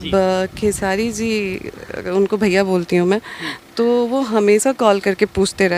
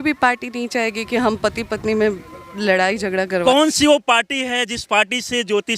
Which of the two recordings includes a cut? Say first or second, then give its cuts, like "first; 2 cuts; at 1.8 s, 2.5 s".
second; 1 cut; at 3.4 s